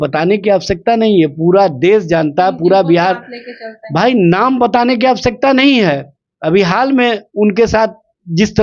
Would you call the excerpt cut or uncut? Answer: uncut